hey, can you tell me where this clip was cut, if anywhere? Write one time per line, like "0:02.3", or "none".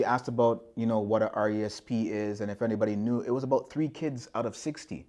none